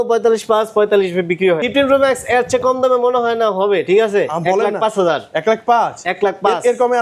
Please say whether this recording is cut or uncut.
cut